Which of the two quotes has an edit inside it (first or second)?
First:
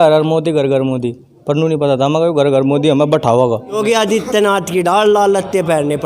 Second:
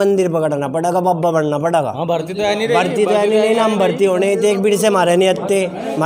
first